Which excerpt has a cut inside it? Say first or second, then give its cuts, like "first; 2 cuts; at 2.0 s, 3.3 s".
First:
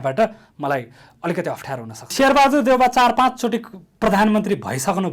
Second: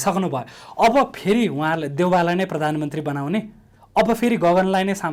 first; 1 cut; at 2.1 s